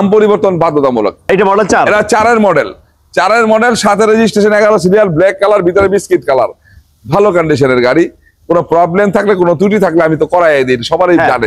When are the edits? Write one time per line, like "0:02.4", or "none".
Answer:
none